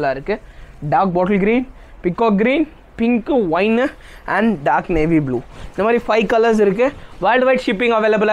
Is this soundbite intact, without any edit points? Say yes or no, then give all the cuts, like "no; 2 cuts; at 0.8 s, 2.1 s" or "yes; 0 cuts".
yes; 0 cuts